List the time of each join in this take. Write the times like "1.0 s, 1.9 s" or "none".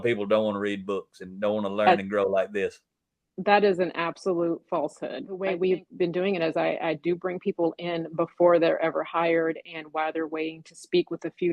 5.4 s